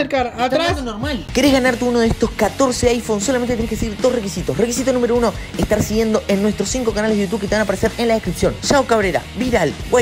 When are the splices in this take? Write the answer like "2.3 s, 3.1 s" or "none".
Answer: 1.2 s